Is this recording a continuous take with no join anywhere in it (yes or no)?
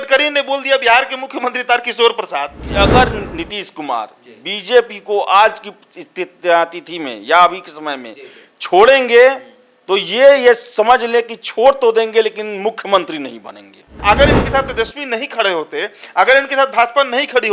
no